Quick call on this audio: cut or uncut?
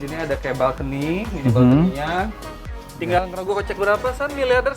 cut